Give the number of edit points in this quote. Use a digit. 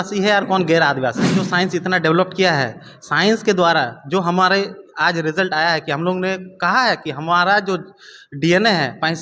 1